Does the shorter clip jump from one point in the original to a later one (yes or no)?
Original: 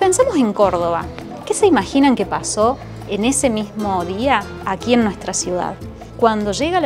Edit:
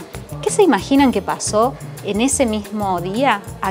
no